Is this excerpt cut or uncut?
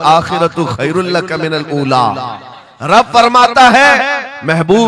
uncut